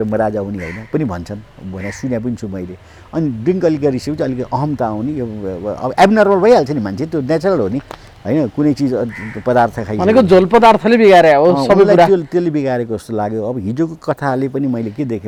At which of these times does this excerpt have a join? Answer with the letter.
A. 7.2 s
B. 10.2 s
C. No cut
C